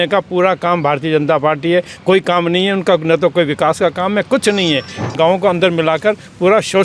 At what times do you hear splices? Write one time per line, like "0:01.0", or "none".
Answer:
0:05.1